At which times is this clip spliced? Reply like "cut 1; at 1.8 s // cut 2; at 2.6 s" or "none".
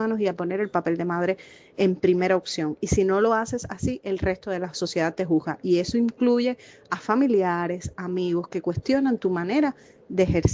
none